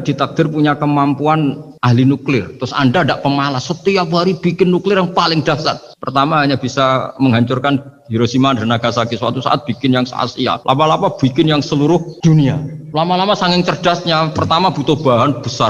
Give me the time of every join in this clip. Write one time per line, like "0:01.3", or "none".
0:01.7
0:10.6
0:12.4